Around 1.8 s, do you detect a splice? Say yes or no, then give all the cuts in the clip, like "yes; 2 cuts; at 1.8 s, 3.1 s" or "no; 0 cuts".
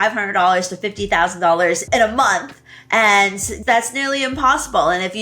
yes; 2 cuts; at 1.8 s, 3.5 s